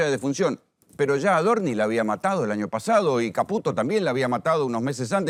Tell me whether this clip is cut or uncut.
uncut